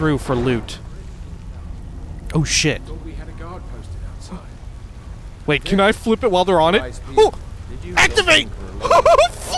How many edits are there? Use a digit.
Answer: 1